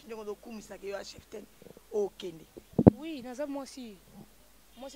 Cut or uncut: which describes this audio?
uncut